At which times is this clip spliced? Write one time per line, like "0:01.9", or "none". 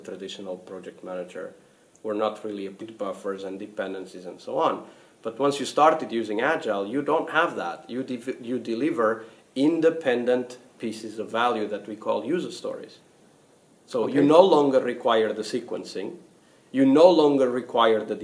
none